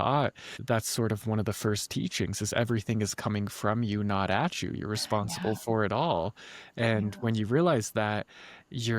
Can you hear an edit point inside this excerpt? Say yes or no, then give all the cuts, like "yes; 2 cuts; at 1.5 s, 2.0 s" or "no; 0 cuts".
no; 0 cuts